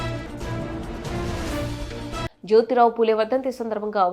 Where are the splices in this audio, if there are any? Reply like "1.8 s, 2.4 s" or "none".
none